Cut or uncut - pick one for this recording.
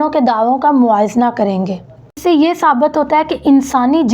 cut